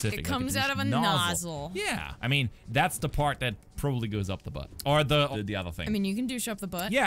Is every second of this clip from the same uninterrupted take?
no; 3 cuts; at 2.1 s, 4.7 s, 5.3 s

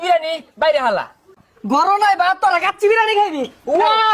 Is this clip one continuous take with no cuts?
no; 1 cut; at 1.3 s

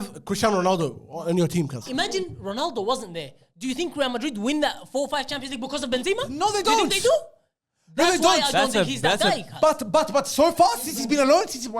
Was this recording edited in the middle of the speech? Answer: yes; 1 cut; at 1.8 s

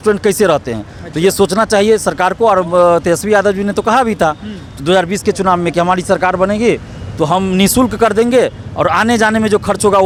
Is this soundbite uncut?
yes; 0 cuts

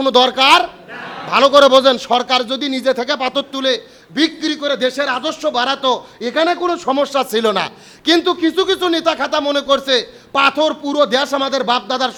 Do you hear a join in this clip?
no; 0 cuts

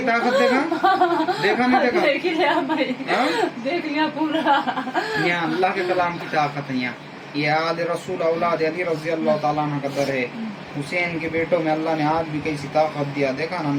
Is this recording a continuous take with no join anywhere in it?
yes; 0 cuts

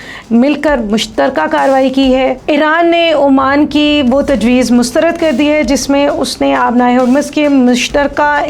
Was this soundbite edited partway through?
yes; 1 cut; at 2.4 s

